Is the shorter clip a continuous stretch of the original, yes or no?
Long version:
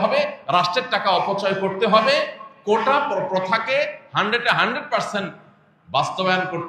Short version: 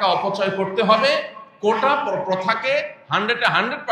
yes